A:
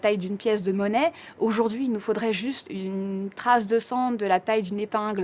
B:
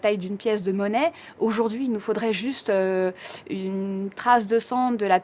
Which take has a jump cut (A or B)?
A